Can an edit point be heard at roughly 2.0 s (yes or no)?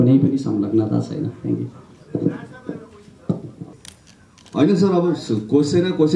no